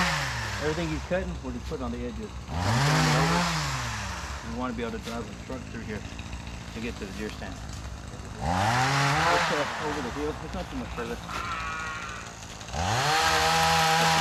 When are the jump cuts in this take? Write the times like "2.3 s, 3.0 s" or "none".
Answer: none